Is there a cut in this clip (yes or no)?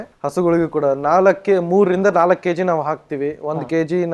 no